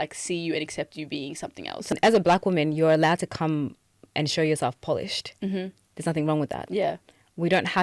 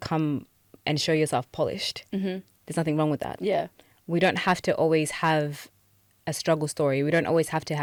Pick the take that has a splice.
first; 1 cut; at 1.9 s

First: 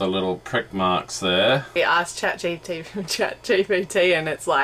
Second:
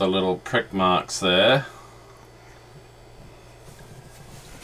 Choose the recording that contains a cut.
first; 1 cut; at 1.8 s

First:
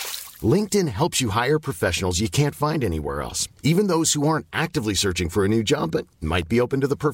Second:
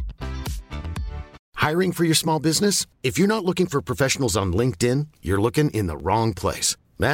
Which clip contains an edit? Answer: second; 1 cut; at 1.3 s

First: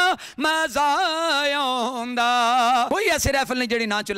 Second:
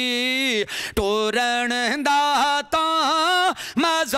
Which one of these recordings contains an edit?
first; 1 cut; at 2.9 s

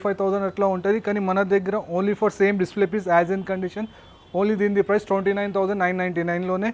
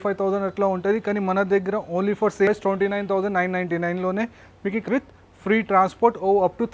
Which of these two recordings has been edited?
second; 2 cuts; at 2.5 s, 4.8 s

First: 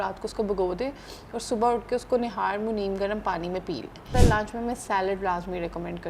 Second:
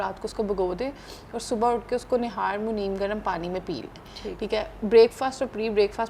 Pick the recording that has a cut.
first; 1 cut; at 4.1 s

